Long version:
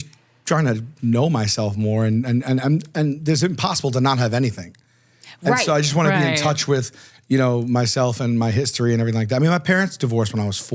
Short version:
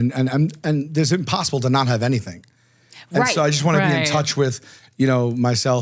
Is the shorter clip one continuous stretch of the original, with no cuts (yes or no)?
yes